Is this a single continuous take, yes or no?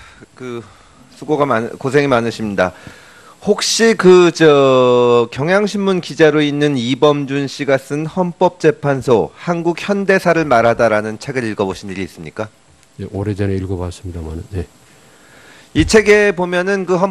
yes